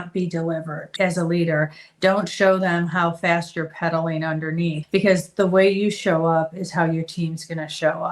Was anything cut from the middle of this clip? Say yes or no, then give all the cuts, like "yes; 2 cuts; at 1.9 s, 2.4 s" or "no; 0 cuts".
yes; 2 cuts; at 0.9 s, 4.8 s